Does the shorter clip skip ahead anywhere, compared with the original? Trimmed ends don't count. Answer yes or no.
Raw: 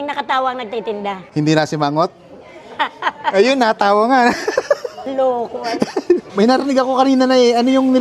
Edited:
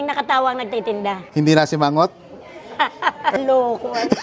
yes